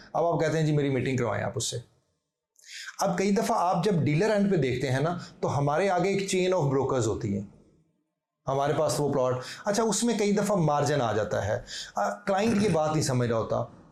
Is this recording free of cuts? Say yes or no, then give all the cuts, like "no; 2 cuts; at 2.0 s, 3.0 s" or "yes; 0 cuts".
yes; 0 cuts